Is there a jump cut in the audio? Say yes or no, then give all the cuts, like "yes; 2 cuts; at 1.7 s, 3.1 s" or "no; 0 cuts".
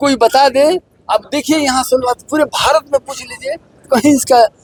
no; 0 cuts